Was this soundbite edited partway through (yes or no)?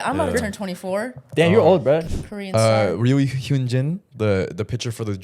yes